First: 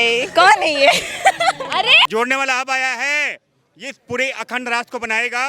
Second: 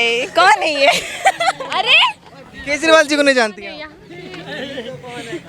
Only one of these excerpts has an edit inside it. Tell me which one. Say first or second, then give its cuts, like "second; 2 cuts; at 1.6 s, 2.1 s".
first; 1 cut; at 2.1 s